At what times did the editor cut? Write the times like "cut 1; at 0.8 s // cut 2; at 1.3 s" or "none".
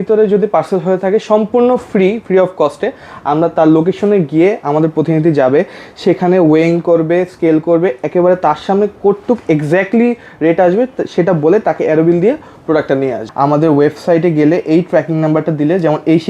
cut 1; at 13.2 s